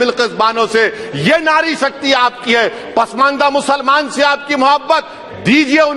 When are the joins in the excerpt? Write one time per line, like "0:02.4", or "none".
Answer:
none